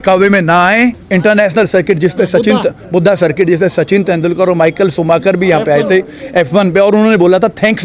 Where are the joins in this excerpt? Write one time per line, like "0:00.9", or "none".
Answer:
0:01.0